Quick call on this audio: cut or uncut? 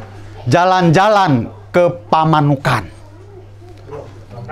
uncut